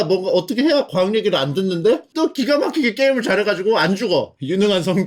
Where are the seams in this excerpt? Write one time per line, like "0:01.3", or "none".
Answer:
none